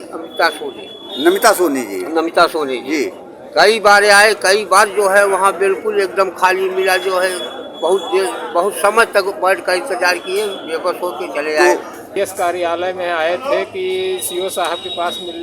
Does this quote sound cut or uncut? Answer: cut